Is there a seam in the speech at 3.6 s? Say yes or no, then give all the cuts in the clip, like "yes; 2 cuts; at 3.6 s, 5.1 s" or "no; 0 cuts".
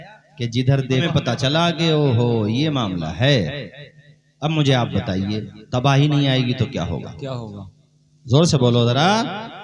no; 1 cut; at 1.0 s